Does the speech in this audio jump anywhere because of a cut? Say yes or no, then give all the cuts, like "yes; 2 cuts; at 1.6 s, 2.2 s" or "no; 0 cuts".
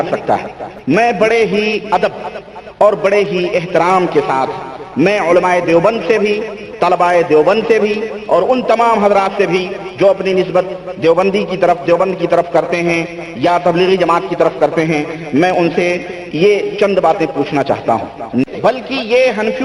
yes; 1 cut; at 18.5 s